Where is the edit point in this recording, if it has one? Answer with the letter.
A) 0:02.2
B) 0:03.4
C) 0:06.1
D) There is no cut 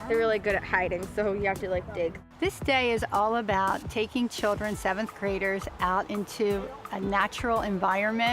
A